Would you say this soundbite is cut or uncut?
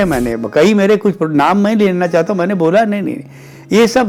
uncut